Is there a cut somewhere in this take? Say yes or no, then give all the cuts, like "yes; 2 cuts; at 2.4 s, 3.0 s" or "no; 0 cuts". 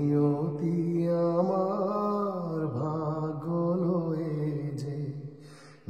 no; 0 cuts